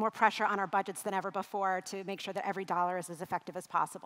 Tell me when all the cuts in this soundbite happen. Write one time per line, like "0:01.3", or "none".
none